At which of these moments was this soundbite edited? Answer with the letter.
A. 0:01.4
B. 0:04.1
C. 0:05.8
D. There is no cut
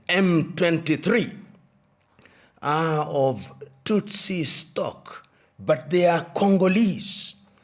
D